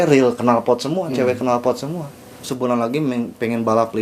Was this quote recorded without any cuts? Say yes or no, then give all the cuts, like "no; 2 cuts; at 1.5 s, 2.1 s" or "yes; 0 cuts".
no; 1 cut; at 2.4 s